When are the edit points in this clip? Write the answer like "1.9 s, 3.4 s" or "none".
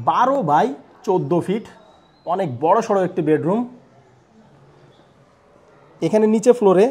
6.0 s